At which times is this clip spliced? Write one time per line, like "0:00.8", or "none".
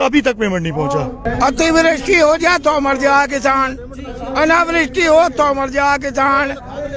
0:01.3